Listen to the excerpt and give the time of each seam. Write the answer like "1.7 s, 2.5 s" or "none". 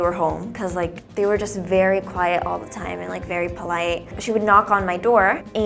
4.2 s